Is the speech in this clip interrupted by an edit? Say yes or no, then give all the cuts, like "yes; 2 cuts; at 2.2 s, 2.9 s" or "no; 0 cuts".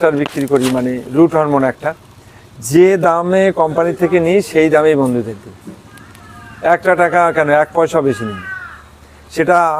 no; 0 cuts